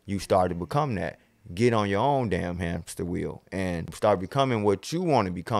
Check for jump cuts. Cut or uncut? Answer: cut